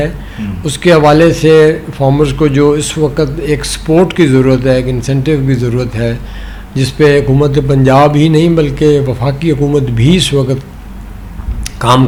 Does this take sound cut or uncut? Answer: uncut